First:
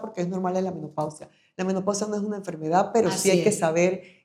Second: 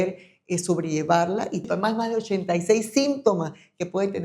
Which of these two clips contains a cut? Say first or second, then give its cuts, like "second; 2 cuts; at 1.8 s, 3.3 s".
second; 1 cut; at 1.7 s